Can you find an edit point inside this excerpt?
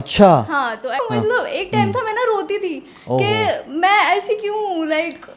yes; 1 cut; at 0.9 s

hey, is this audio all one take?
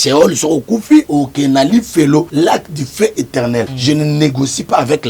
no; 3 cuts; at 1.1 s, 2.3 s, 3.7 s

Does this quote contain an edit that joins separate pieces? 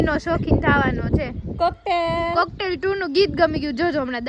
no; 0 cuts

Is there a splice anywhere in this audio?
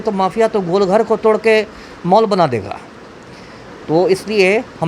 no; 0 cuts

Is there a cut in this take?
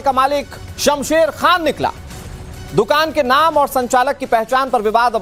no; 0 cuts

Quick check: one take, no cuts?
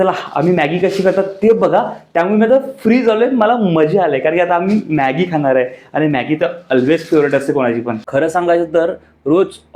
no; 1 cut; at 8.0 s

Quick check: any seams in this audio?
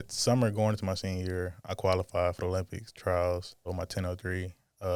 no; 0 cuts

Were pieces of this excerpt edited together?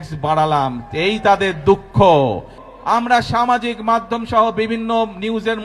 no; 0 cuts

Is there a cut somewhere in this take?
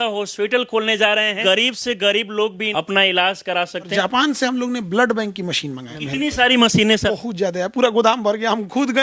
yes; 5 cuts; at 1.4 s, 2.6 s, 3.9 s, 5.9 s, 7.1 s

